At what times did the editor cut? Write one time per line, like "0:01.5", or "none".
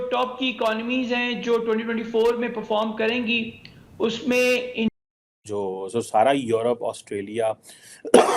0:04.9